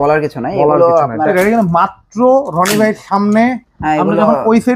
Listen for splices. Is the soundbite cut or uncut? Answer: cut